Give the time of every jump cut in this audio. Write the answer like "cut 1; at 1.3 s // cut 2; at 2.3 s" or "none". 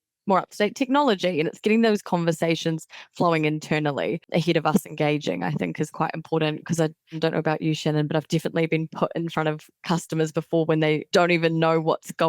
cut 1; at 4.3 s // cut 2; at 7.2 s // cut 3; at 11.0 s